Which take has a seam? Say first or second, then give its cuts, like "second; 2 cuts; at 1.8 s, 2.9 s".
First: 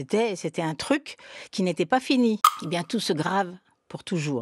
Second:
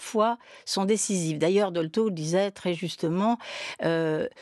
first; 1 cut; at 2.5 s